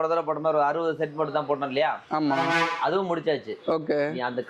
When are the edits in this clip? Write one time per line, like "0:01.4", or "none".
none